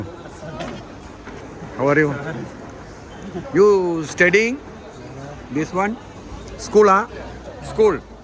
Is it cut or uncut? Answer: uncut